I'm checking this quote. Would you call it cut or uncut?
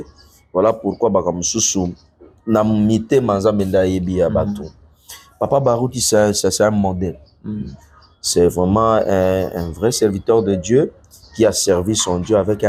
uncut